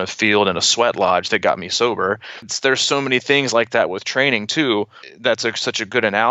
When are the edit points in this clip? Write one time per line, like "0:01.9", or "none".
0:02.5
0:05.0